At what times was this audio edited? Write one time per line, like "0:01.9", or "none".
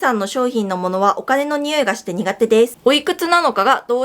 0:02.7